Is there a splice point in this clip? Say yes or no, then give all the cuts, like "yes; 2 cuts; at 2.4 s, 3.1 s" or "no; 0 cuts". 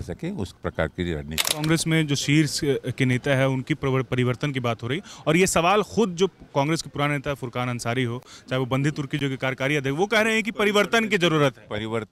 yes; 1 cut; at 1.5 s